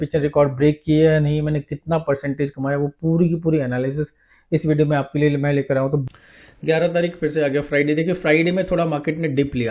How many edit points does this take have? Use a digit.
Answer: 1